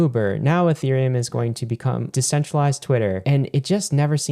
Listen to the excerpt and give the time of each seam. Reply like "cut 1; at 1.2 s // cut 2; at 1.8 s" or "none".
cut 1; at 2.1 s // cut 2; at 3.2 s